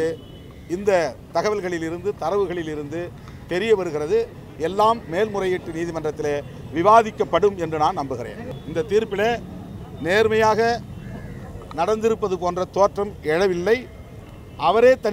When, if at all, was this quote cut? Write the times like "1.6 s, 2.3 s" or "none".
8.5 s